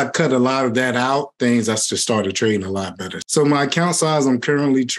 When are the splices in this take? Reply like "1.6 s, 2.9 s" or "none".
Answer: 1.4 s, 3.2 s

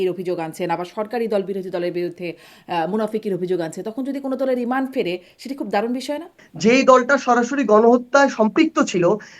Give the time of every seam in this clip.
6.4 s

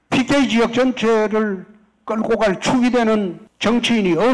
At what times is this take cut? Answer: 3.4 s

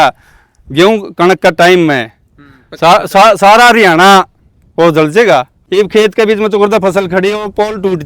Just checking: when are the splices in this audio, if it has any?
5.5 s

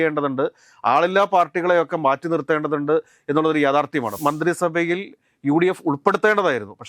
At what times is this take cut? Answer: 4.2 s

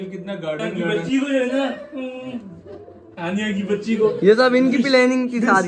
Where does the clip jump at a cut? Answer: 1.0 s

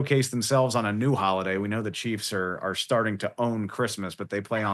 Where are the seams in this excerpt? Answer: none

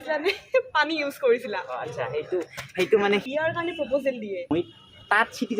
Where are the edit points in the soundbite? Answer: 3.2 s, 4.5 s

